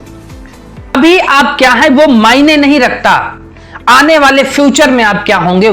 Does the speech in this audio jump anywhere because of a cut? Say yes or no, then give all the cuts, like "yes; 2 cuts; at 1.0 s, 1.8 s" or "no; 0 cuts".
yes; 1 cut; at 1.0 s